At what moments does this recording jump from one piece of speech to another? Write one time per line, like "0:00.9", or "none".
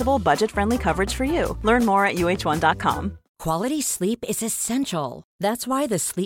0:03.3